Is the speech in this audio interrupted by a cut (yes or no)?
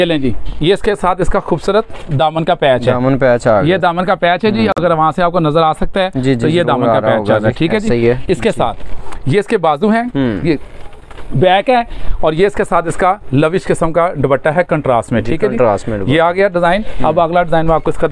no